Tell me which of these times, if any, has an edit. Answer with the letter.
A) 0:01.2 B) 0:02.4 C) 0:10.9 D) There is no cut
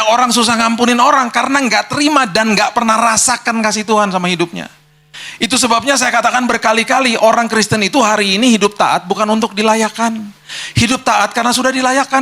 B